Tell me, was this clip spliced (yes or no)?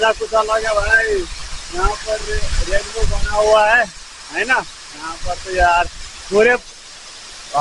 no